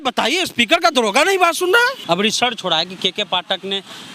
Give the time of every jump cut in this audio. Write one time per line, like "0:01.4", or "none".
0:02.0